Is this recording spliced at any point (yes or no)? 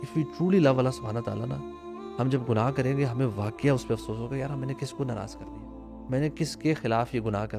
no